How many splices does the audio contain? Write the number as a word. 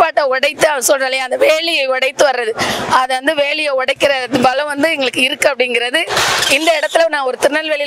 zero